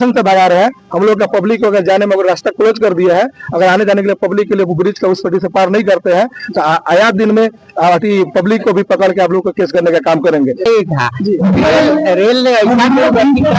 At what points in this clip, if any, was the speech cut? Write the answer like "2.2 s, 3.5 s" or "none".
10.7 s